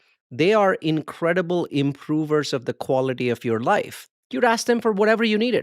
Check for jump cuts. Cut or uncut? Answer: cut